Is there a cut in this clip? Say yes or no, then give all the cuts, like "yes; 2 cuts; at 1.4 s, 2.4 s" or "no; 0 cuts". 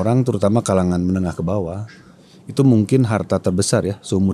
no; 0 cuts